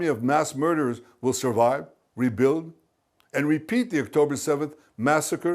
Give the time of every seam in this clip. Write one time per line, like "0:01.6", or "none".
none